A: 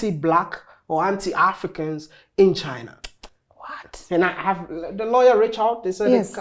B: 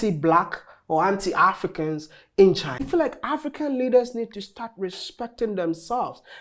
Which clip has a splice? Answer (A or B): B